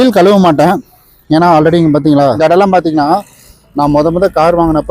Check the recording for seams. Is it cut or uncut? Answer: cut